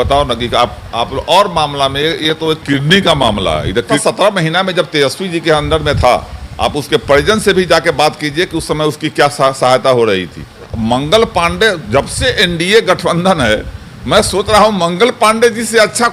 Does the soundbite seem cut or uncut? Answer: cut